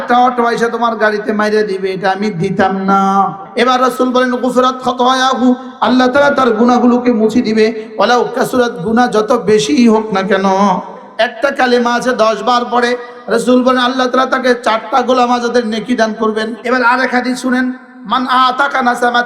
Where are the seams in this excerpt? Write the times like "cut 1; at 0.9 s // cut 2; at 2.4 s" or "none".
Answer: cut 1; at 3.4 s // cut 2; at 11.0 s // cut 3; at 16.6 s